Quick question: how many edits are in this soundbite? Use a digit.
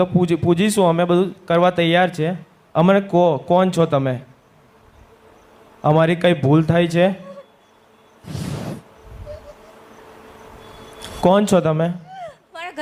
0